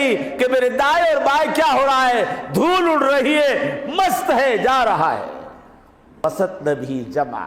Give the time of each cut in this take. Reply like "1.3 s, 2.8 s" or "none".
6.2 s